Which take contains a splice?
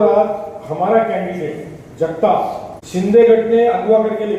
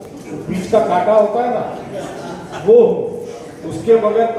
first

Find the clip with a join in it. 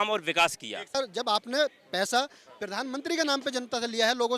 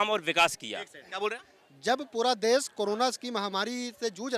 first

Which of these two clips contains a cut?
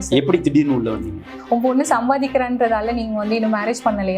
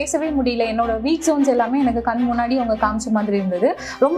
first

